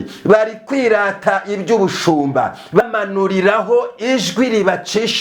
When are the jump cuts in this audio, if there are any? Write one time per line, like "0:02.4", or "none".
0:02.8